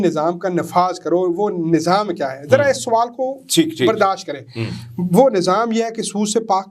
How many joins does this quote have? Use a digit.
0